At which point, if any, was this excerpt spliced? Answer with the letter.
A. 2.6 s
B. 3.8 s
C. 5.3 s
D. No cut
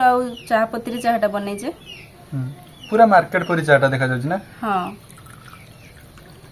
D